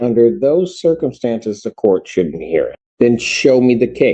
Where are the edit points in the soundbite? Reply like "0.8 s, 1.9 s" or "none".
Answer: 2.8 s